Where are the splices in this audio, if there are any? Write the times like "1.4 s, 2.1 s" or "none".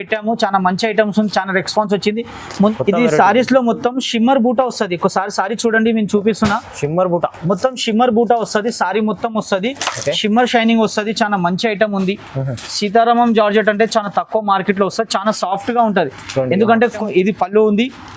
2.7 s, 17.0 s

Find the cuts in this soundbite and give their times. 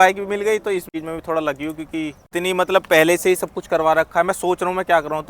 0.9 s, 2.2 s

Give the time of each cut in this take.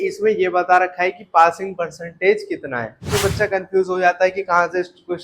3.1 s

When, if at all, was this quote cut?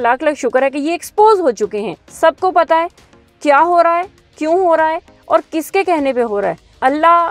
2.0 s

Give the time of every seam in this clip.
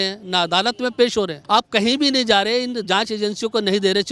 1.4 s

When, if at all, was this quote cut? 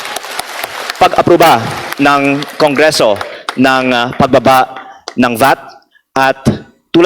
none

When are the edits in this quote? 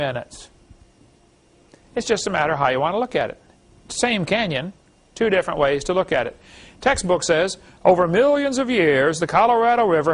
none

